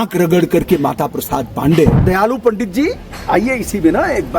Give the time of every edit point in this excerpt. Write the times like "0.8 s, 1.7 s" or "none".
2.0 s